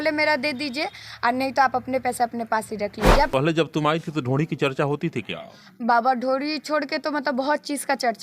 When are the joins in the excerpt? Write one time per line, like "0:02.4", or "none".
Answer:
0:03.3